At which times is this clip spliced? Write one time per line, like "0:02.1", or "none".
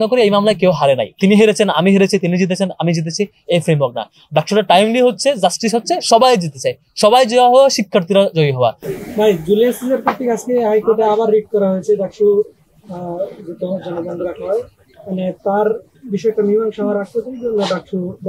0:01.1
0:08.8